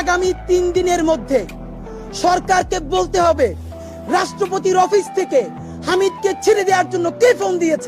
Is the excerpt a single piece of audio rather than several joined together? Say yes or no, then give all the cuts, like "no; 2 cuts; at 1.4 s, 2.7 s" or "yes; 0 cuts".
yes; 0 cuts